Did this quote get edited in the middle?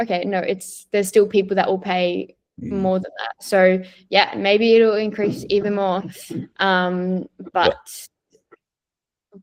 no; 0 cuts

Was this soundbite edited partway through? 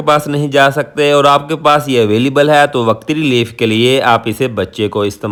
no; 0 cuts

